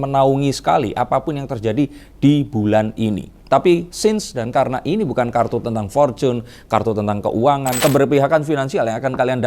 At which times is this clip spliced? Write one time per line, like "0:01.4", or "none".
0:07.8